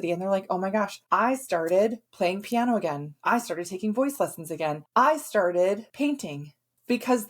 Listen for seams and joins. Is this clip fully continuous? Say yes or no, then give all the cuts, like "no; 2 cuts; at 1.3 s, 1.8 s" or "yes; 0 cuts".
no; 5 cuts; at 1.0 s, 2.0 s, 3.1 s, 4.8 s, 6.3 s